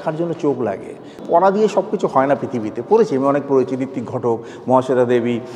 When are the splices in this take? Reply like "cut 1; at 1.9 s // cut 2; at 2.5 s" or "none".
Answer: cut 1; at 1.2 s